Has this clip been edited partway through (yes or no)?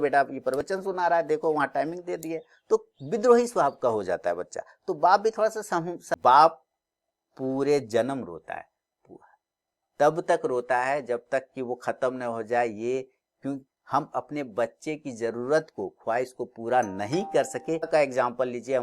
yes